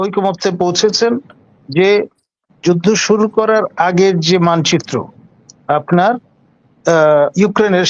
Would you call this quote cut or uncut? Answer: uncut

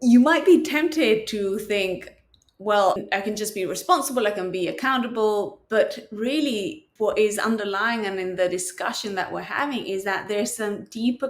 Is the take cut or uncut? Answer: cut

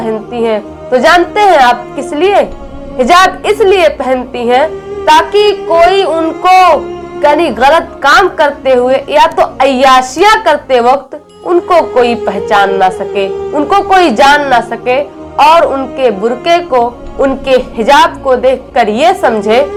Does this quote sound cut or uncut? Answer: uncut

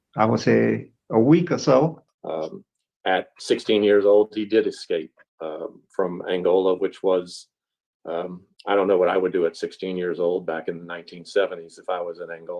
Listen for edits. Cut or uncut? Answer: cut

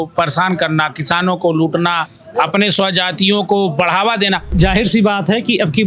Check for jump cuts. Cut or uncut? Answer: cut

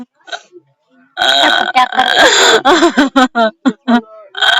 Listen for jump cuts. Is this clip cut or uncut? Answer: uncut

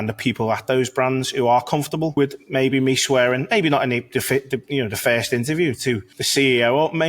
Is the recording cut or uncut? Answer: cut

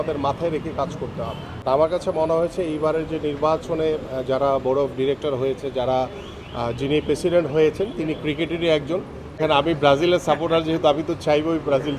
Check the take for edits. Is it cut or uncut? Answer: cut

